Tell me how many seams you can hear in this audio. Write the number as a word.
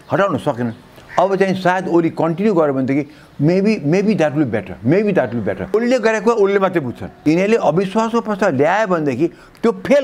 two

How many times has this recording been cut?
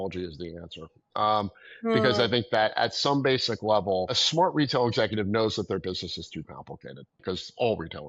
two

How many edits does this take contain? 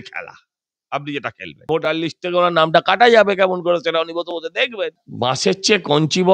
two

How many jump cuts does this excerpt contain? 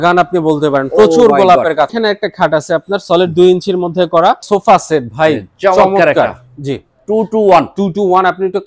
two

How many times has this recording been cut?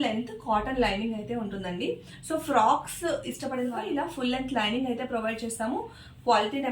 one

